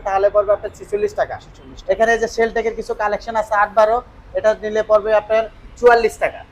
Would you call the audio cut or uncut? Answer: uncut